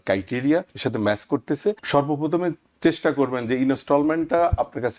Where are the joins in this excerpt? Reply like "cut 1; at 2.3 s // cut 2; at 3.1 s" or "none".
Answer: cut 1; at 1.8 s